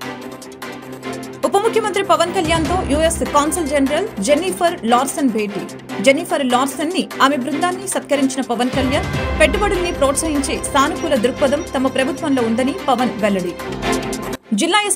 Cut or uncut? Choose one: uncut